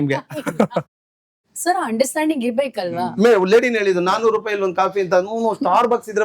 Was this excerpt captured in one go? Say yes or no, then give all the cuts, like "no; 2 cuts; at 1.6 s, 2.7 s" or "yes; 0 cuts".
no; 2 cuts; at 0.9 s, 3.1 s